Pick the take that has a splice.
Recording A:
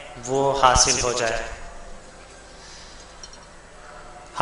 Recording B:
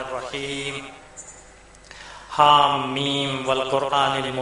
B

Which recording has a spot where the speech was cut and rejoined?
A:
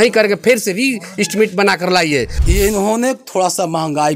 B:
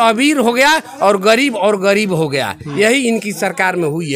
A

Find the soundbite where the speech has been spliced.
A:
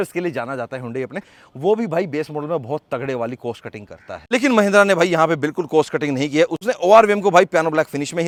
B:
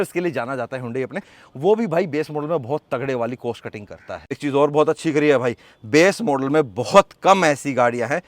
B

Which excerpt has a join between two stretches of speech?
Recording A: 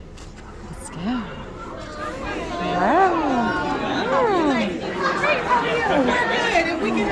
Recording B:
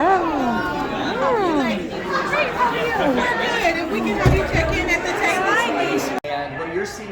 B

